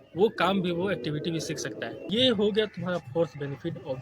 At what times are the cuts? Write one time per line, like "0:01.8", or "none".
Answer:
0:02.1